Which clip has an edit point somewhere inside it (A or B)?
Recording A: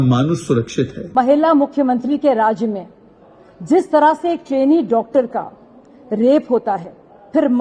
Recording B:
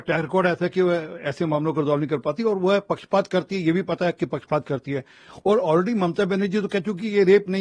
A